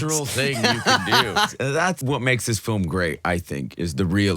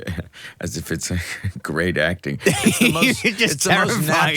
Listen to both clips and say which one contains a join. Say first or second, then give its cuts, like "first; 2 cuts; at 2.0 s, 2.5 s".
first; 1 cut; at 1.8 s